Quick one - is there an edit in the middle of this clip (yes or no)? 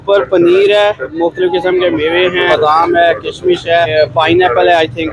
yes